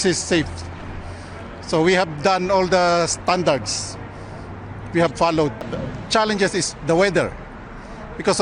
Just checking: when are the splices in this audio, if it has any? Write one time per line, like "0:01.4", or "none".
0:05.7